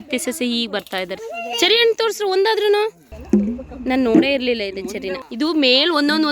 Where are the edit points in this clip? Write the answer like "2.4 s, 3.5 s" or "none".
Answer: 1.2 s, 3.1 s, 5.2 s